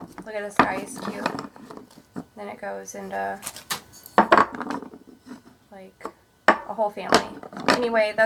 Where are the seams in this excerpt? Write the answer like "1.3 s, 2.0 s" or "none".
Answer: none

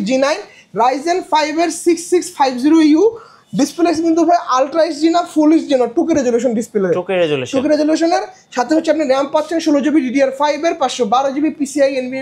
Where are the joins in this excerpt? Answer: none

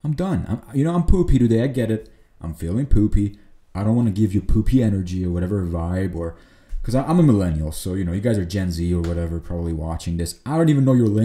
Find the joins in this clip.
none

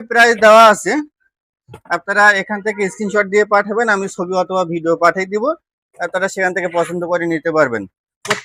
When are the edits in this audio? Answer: none

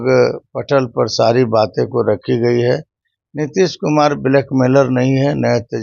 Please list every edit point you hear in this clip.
none

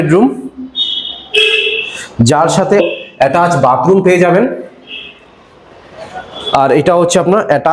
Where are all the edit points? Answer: 2.8 s

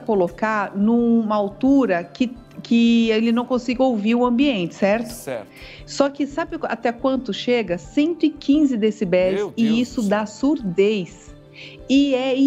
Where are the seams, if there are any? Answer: none

